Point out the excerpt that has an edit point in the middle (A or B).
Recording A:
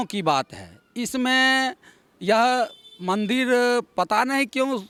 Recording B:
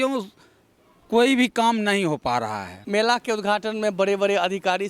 B